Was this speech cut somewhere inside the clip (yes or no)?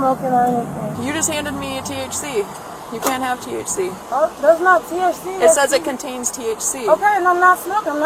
yes